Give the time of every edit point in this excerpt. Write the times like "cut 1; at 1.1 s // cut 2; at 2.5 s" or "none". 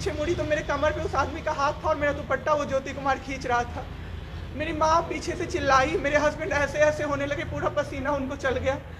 none